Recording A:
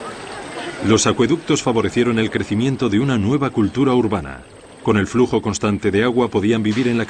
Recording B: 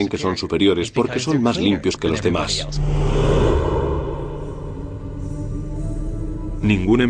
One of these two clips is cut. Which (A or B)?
A